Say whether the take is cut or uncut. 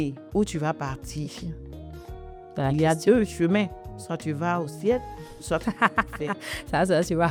uncut